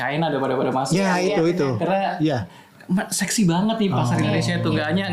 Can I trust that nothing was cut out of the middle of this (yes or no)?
yes